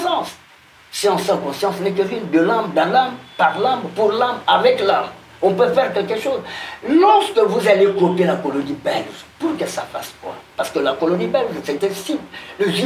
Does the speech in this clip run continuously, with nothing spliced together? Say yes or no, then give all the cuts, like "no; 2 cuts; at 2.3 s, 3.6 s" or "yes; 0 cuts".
yes; 0 cuts